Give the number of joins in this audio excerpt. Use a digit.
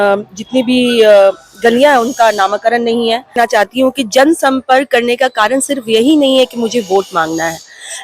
1